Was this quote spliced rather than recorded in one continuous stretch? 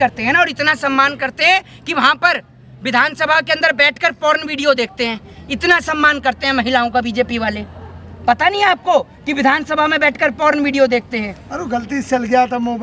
no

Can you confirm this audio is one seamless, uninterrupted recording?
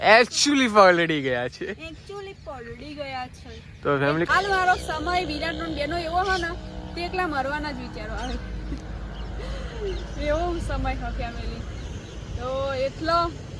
no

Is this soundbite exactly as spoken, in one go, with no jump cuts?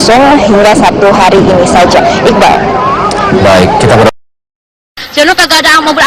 no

